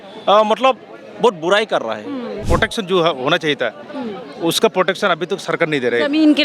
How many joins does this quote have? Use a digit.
1